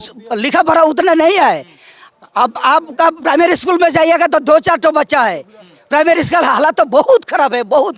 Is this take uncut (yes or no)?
yes